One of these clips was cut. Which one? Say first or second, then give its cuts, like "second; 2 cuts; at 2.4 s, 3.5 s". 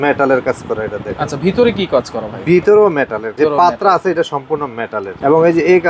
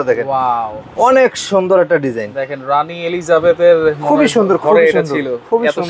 first; 2 cuts; at 3.2 s, 5.1 s